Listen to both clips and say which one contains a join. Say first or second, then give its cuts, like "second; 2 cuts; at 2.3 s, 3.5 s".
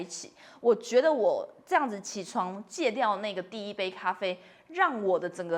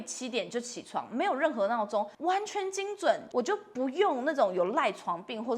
second; 2 cuts; at 2.1 s, 3.2 s